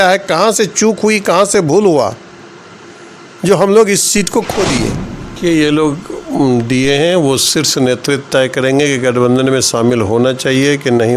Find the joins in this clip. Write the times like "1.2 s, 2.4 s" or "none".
5.3 s

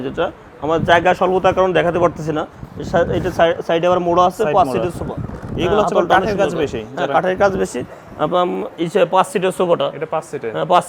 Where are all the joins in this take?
none

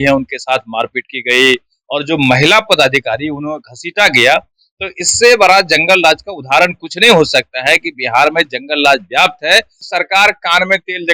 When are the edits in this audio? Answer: 9.8 s

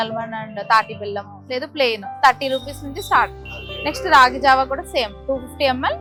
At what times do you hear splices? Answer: none

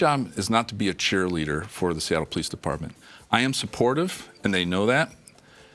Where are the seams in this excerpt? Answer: none

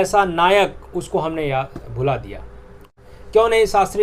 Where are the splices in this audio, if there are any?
2.8 s

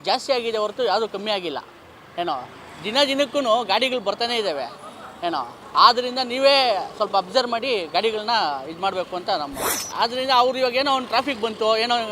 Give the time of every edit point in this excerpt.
9.7 s

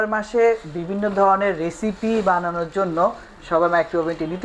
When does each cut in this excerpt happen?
none

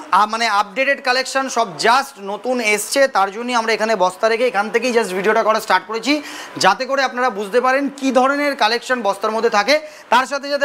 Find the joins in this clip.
none

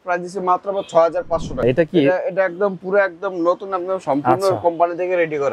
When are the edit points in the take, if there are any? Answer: 1.6 s

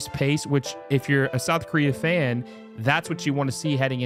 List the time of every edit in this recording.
none

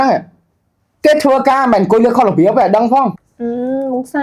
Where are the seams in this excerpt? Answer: 3.3 s

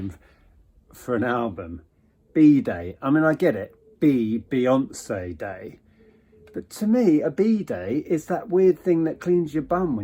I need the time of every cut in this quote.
none

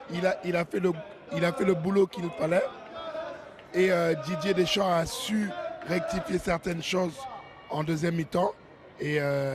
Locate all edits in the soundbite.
1.5 s

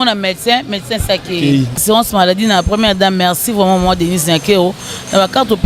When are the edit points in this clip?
1.8 s

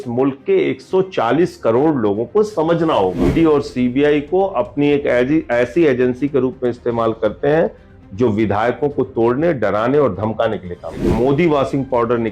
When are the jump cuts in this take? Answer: 3.3 s, 11.1 s

